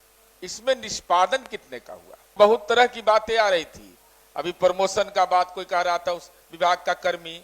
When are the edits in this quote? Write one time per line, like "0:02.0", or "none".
0:02.3